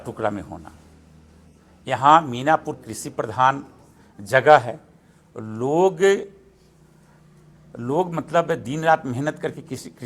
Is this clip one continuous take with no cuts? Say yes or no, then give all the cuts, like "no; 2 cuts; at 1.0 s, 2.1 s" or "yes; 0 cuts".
yes; 0 cuts